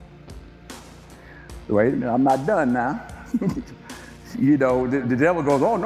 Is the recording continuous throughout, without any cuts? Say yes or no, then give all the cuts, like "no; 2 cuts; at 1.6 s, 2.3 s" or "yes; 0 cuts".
yes; 0 cuts